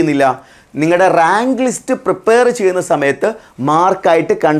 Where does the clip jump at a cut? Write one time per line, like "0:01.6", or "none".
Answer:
none